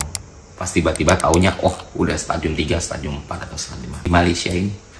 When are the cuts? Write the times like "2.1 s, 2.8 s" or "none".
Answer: 4.1 s